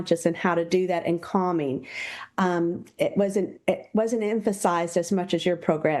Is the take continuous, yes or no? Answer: yes